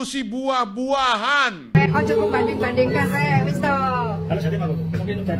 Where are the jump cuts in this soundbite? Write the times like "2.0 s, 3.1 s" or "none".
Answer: 1.8 s

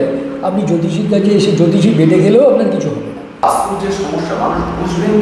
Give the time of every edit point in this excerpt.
3.4 s

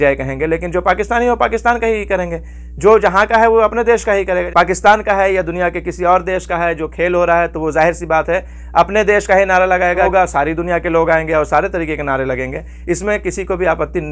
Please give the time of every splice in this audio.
4.5 s, 10.1 s

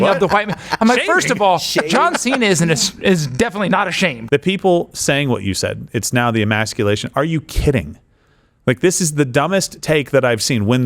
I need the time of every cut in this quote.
4.2 s

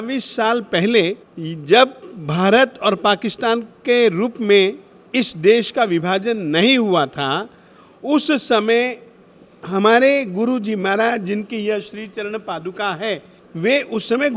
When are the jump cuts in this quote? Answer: none

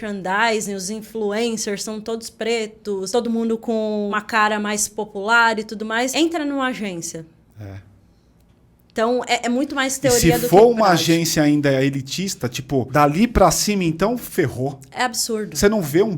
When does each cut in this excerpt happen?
3.1 s, 4.2 s, 6.1 s, 12.9 s

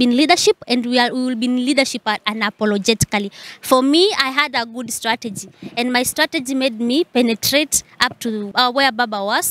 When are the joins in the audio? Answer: 3.4 s, 8.5 s

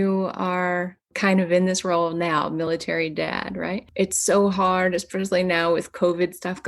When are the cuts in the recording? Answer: 1.1 s, 3.9 s

